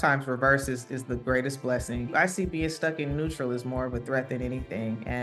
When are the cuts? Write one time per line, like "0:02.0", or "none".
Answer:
0:02.1